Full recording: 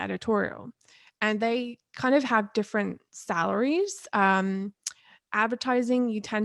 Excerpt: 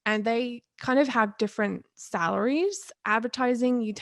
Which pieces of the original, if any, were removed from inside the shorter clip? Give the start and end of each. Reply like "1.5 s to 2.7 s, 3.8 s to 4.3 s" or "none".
4.0 s to 5.1 s